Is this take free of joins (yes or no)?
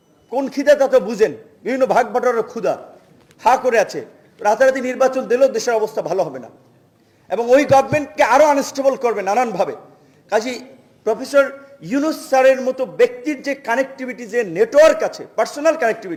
yes